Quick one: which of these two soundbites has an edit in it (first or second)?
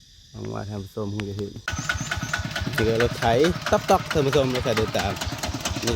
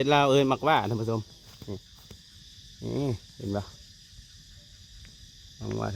first